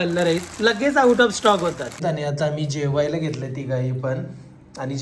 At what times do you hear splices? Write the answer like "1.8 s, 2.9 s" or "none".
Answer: 2.0 s

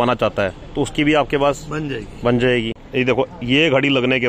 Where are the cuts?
2.8 s

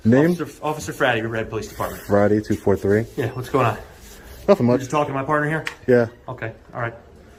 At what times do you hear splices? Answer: none

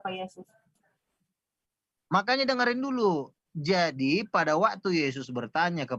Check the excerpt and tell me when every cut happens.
none

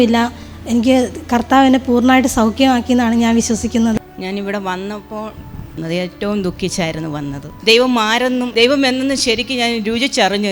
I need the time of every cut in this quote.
5.7 s, 7.6 s

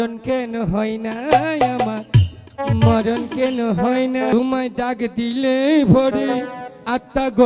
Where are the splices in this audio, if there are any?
4.3 s

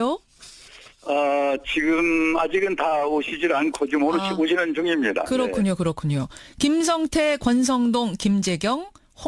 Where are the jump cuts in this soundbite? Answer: 5.1 s

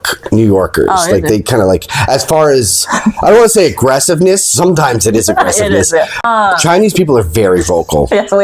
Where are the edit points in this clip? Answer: 6.2 s

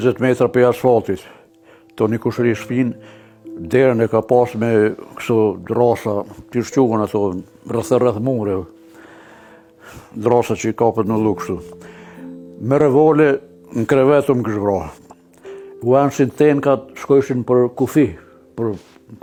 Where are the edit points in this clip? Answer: none

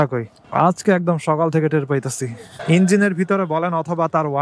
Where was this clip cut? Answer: 2.5 s

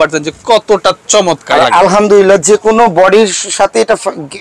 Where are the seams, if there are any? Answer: none

